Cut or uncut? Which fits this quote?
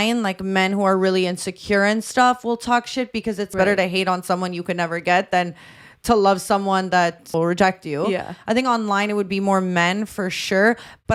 uncut